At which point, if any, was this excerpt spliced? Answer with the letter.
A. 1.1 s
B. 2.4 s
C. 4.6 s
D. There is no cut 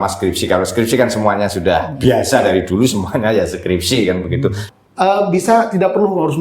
C